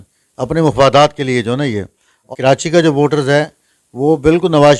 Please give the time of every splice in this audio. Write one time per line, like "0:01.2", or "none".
0:02.3